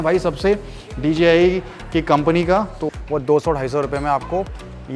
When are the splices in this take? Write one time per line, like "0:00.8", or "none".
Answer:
0:02.8